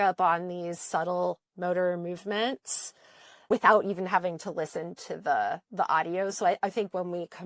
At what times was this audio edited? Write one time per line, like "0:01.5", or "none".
none